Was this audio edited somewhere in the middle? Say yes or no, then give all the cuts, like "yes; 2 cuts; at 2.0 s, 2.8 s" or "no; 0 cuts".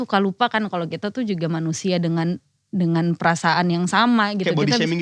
no; 0 cuts